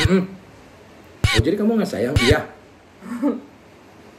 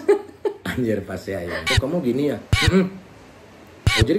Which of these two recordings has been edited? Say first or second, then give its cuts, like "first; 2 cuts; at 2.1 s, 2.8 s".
second; 1 cut; at 1.7 s